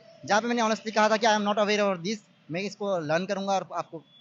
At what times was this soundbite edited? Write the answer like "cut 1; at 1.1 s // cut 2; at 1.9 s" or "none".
none